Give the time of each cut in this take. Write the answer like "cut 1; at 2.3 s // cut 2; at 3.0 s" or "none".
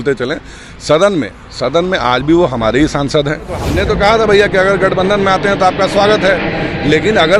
cut 1; at 3.6 s